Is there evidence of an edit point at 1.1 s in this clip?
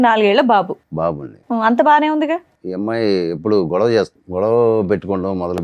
no; 2 cuts; at 2.6 s, 4.2 s

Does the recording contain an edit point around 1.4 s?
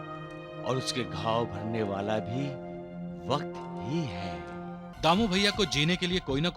no; 1 cut; at 4.9 s

